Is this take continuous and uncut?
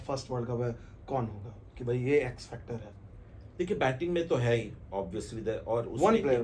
yes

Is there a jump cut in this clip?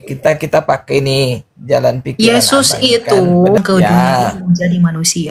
yes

